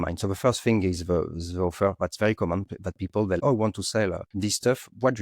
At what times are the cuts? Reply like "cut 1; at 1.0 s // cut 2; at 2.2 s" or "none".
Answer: cut 1; at 3.4 s // cut 2; at 4.3 s